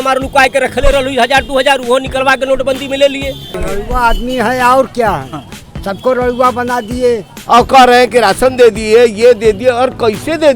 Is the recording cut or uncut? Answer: cut